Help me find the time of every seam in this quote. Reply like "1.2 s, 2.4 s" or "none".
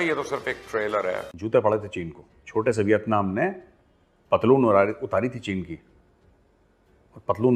1.3 s